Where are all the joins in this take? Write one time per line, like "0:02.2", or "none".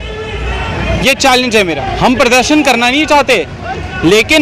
0:01.8